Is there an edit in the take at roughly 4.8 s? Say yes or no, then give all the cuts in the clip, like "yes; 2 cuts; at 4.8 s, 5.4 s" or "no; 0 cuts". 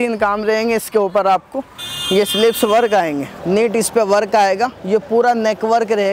no; 1 cut; at 3.3 s